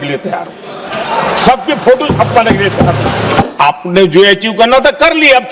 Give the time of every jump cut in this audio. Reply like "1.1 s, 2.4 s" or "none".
3.5 s